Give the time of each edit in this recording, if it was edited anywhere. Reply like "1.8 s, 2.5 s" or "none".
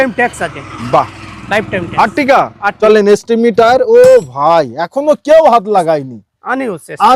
2.5 s